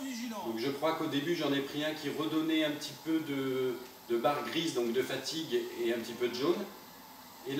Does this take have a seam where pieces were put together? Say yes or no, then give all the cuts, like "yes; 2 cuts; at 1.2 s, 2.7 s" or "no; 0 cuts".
no; 0 cuts